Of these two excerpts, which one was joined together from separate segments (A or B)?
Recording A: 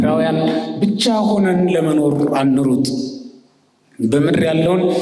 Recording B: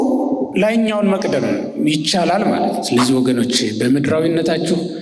B